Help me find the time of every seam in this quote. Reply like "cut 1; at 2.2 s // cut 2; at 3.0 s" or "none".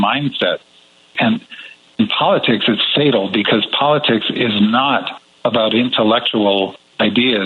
cut 1; at 1.1 s